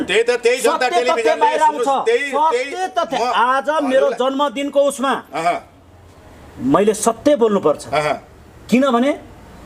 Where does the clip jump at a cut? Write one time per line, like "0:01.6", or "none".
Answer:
none